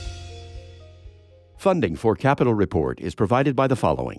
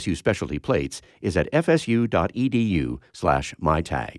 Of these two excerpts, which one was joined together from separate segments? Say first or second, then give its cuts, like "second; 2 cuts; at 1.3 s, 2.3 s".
first; 1 cut; at 1.5 s